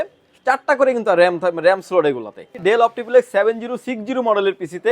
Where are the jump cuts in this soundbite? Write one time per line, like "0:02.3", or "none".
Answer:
0:02.6